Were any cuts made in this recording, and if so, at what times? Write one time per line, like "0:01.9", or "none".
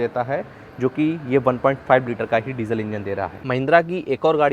0:03.4